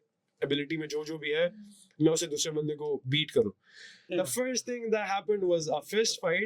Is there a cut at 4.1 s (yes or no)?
yes